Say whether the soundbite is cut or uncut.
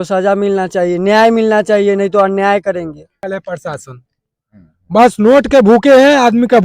cut